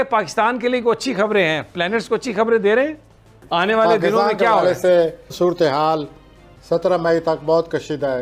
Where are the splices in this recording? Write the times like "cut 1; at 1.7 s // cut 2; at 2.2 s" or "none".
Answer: none